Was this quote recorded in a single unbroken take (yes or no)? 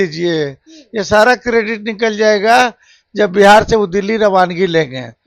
yes